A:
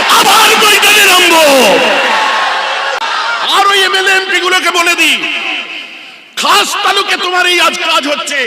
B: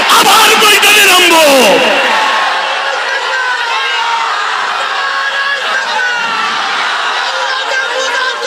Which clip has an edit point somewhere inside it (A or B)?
A